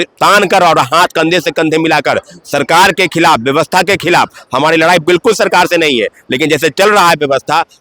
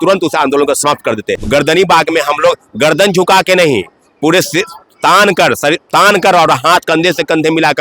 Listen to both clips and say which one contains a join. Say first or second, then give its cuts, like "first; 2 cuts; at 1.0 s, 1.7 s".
second; 1 cut; at 1.3 s